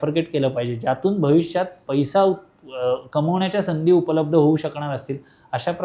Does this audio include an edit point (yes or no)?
no